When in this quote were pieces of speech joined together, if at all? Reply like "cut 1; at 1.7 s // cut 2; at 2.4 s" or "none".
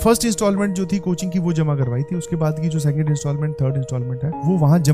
none